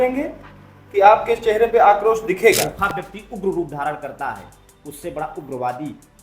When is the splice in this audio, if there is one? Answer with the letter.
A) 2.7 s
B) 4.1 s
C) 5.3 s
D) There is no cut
A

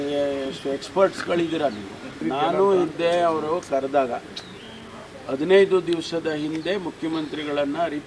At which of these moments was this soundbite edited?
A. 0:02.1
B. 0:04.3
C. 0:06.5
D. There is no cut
A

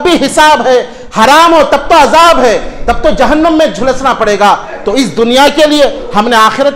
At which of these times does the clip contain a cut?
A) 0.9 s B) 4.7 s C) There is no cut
C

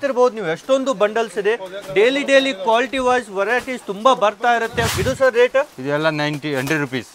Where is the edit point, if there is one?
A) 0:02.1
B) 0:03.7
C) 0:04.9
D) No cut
C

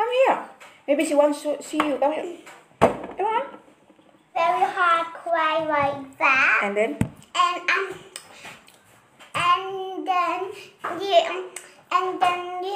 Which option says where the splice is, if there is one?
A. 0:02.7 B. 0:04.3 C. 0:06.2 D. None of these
B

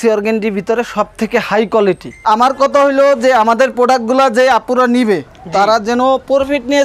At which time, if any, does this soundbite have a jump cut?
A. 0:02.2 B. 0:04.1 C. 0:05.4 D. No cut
A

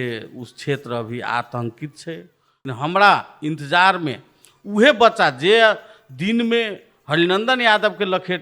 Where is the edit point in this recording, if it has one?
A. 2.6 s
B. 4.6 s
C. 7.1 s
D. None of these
A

